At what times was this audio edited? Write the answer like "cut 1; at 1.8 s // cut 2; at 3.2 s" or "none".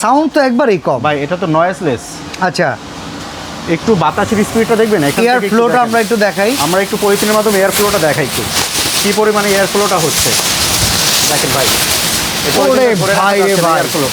none